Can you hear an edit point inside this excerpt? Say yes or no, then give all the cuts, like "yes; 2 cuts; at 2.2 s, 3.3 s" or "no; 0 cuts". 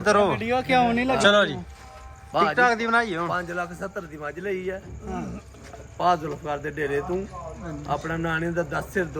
no; 0 cuts